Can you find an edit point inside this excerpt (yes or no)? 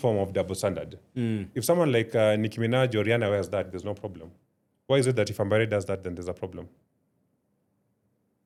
no